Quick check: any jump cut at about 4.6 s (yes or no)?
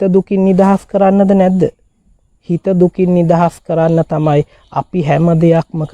no